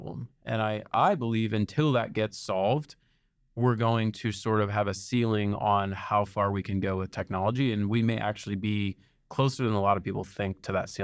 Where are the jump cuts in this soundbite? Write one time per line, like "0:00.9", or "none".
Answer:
none